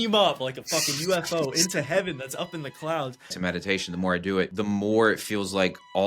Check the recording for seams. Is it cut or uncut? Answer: cut